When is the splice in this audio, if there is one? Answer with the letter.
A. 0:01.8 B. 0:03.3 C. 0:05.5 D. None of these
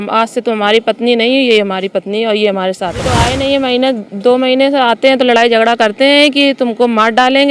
B